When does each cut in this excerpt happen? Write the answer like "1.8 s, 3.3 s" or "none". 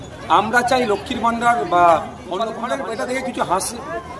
2.6 s